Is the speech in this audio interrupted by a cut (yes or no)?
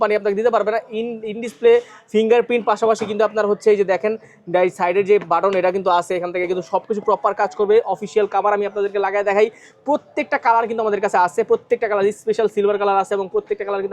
no